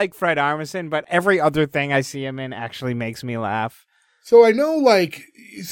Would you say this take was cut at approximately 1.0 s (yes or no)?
yes